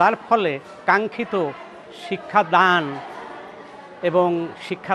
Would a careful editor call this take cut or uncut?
uncut